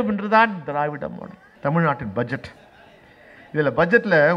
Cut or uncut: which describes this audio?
cut